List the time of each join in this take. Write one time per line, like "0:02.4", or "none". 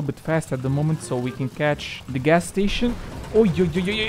0:01.9